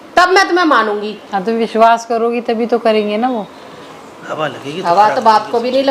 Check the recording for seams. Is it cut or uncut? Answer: cut